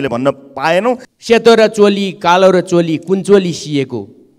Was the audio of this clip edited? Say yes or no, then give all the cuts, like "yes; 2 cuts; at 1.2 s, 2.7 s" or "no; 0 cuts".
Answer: yes; 1 cut; at 1.1 s